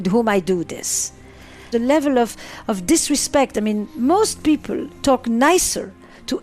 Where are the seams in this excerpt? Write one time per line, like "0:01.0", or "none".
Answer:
0:01.7